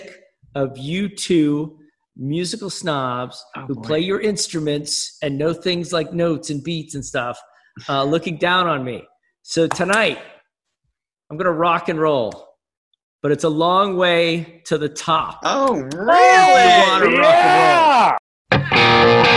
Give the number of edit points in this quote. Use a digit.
1